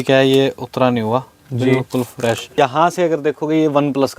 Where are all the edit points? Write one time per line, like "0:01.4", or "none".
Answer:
0:02.5